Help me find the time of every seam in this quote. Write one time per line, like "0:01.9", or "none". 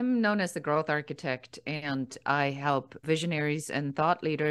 0:03.0